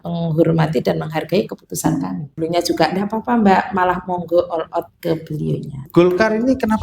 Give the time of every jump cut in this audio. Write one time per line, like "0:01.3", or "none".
0:02.4
0:05.8